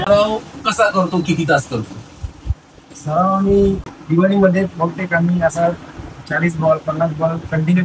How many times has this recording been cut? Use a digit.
1